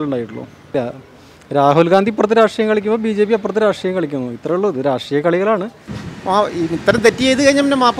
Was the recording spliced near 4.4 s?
no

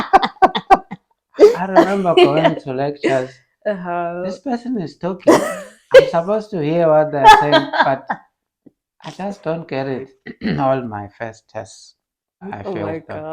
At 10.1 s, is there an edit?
yes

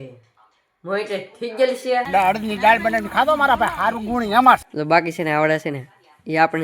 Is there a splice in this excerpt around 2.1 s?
yes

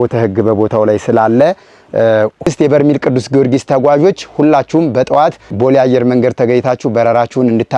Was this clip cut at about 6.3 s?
no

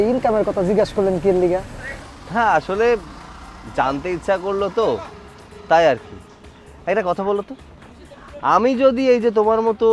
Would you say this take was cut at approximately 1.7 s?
no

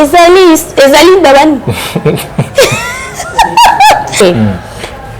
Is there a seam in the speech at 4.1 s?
yes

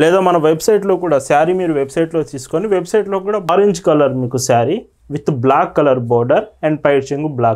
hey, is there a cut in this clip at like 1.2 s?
no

